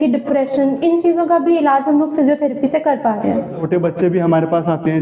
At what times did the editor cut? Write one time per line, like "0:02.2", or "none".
0:03.6